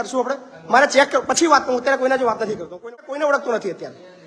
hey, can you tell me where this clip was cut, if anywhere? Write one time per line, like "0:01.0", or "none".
0:02.8